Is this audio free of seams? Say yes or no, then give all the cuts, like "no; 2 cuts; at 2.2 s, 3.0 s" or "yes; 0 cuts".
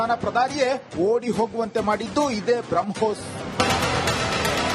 yes; 0 cuts